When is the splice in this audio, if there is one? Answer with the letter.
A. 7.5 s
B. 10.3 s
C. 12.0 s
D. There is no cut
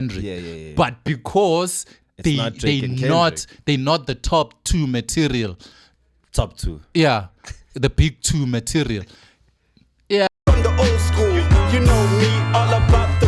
B